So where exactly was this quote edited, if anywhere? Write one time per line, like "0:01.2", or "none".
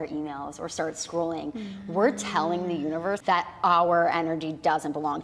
0:03.2